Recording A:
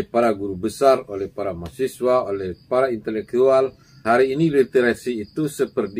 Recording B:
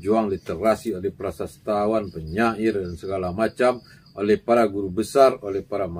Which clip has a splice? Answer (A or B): A